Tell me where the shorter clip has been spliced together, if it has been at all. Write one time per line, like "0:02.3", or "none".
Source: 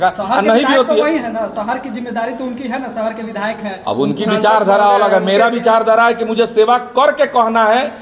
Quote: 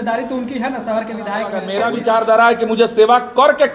0:01.6